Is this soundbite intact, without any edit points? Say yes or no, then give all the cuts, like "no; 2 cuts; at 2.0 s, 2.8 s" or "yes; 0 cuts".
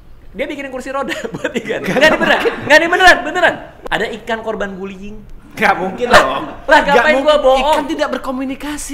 no; 1 cut; at 3.7 s